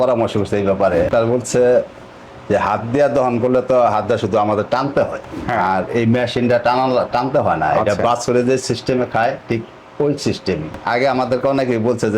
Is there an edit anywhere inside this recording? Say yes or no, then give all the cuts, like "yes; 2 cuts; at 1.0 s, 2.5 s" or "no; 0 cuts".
yes; 3 cuts; at 1.1 s, 5.6 s, 10.7 s